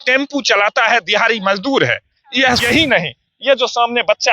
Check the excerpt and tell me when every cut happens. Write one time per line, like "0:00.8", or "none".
0:02.6